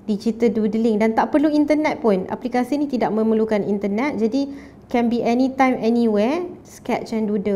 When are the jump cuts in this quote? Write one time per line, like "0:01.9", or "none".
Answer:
0:06.6